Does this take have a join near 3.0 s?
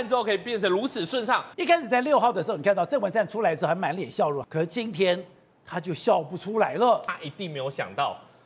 no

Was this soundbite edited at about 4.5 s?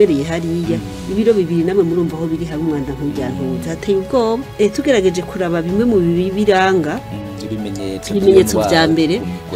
yes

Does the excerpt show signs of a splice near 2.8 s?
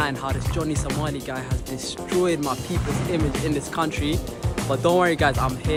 no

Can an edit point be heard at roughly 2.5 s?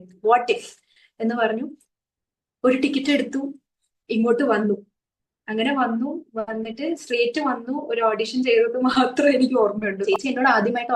no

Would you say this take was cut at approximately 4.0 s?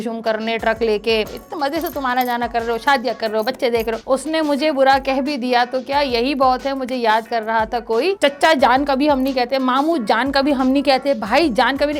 yes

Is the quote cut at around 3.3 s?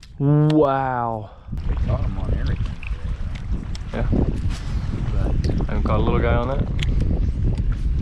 no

